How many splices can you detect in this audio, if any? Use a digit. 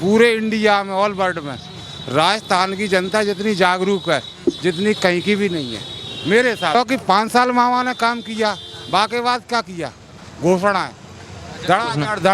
1